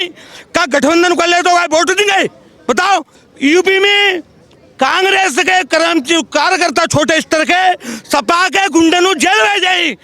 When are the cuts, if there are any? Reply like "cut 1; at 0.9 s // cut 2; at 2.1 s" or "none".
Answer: cut 1; at 3.2 s

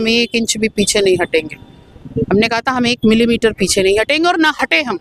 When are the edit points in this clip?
none

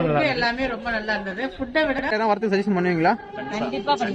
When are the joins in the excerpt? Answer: cut 1; at 2.1 s

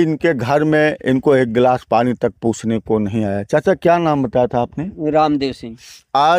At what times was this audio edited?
none

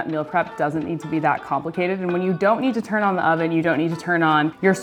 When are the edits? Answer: none

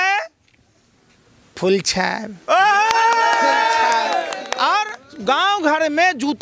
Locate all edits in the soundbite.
cut 1; at 5.0 s

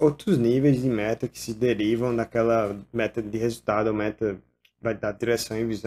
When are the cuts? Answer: none

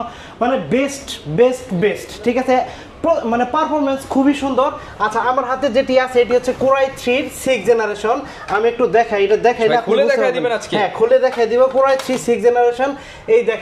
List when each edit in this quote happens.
none

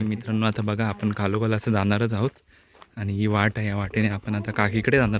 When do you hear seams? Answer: none

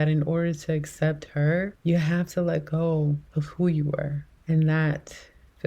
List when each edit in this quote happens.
none

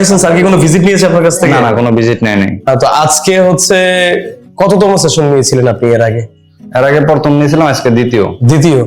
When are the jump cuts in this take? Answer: cut 1; at 2.7 s

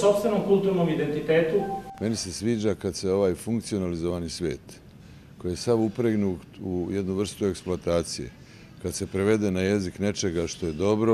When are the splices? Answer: cut 1; at 1.9 s

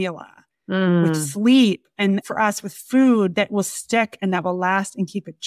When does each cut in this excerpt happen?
cut 1; at 2.0 s // cut 2; at 3.3 s

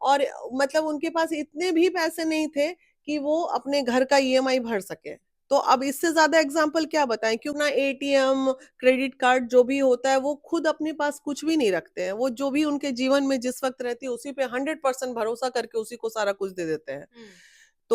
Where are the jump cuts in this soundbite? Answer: cut 1; at 7.5 s

